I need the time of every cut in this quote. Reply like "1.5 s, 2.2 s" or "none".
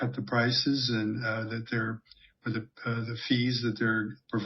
none